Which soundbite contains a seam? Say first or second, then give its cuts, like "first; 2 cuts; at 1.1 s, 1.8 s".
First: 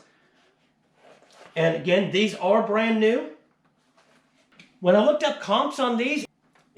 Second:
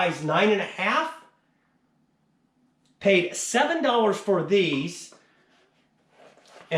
first; 1 cut; at 4.6 s